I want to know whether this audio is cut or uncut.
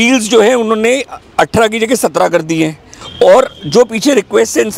cut